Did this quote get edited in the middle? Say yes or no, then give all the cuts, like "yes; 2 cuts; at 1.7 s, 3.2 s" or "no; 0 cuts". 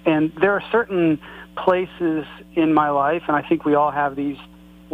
no; 0 cuts